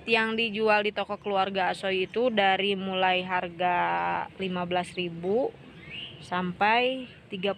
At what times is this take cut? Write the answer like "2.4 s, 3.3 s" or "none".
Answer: none